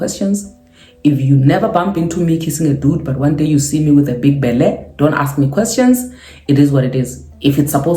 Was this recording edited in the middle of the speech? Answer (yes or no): no